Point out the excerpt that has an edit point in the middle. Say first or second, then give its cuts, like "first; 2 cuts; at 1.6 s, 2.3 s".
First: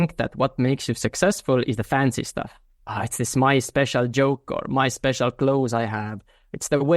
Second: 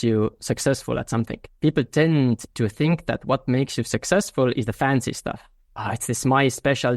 second; 1 cut; at 1.4 s